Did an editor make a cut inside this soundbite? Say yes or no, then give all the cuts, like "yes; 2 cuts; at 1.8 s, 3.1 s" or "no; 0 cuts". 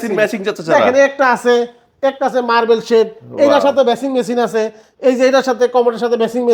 no; 0 cuts